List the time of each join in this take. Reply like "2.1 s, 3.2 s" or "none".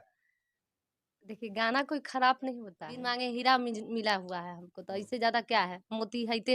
3.2 s